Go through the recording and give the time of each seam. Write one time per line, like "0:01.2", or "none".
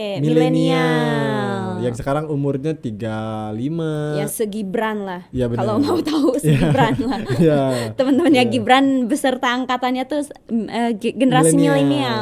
none